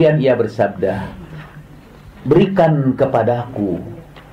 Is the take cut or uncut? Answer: uncut